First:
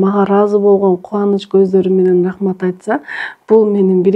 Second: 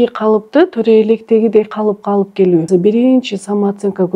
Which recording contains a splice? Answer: second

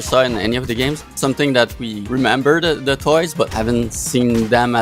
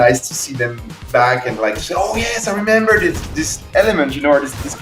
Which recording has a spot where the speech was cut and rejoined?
first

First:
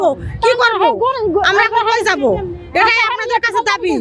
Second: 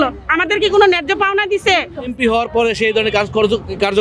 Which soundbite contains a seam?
second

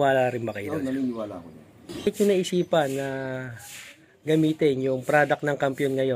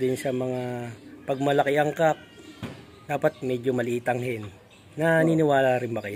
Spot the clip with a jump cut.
first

